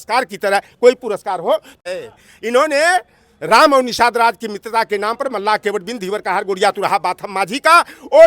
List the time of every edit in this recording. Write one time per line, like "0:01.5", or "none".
0:01.8